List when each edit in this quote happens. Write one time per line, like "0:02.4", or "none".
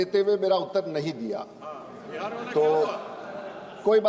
none